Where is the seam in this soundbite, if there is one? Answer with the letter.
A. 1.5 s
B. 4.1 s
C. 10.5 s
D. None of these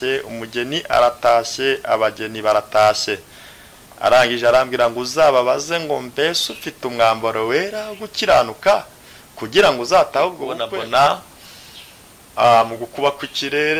C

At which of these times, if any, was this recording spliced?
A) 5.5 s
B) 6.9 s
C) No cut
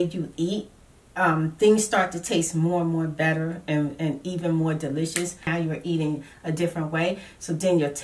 A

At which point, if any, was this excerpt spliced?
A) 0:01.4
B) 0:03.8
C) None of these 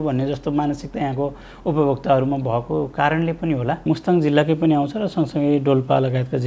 B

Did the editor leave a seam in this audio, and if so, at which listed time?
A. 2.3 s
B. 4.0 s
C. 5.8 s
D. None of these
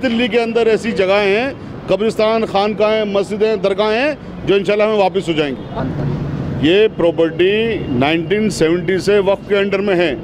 C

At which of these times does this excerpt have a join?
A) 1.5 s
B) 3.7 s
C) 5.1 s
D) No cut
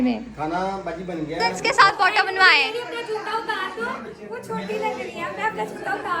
A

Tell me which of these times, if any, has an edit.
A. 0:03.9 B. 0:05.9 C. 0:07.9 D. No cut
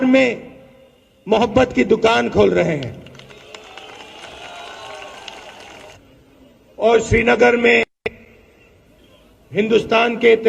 B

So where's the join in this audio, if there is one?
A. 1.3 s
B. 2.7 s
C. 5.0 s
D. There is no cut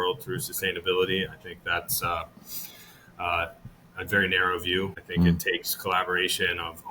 C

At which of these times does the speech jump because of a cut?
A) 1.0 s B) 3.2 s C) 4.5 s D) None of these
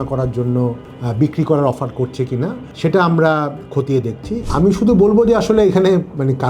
C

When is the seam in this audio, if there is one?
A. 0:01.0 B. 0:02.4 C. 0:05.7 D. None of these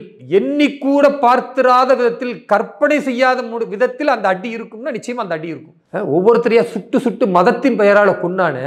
C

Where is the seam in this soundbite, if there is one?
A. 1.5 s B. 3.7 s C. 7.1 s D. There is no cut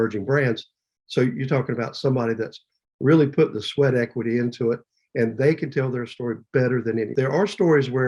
C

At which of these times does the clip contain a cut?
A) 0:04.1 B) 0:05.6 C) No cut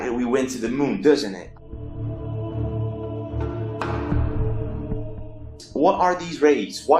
C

